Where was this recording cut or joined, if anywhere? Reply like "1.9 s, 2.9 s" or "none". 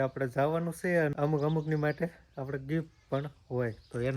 1.1 s